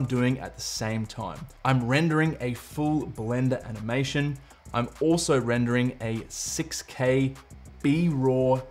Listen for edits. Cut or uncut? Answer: uncut